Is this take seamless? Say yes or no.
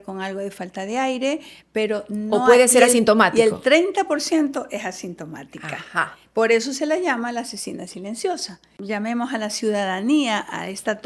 no